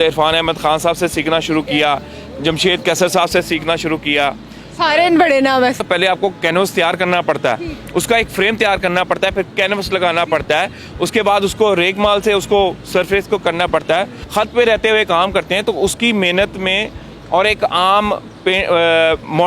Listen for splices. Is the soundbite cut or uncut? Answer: cut